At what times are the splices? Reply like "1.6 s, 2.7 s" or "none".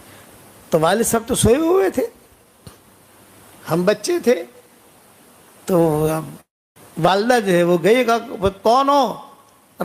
none